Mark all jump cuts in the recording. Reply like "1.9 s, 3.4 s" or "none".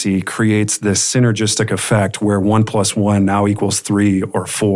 none

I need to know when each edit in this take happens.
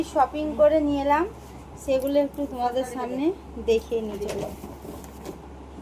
none

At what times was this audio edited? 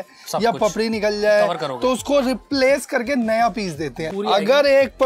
4.0 s

